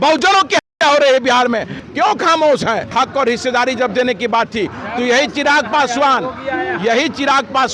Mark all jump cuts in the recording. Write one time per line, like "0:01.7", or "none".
0:01.8
0:02.9